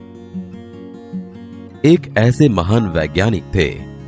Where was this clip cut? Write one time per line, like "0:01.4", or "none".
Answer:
0:01.8